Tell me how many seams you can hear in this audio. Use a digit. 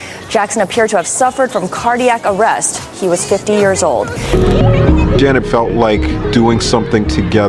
1